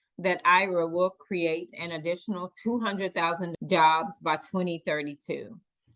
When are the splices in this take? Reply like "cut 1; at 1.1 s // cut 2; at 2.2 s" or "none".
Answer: cut 1; at 3.5 s